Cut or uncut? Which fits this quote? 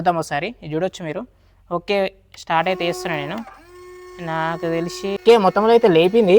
cut